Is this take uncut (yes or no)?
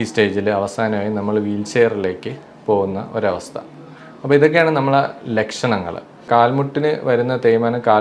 no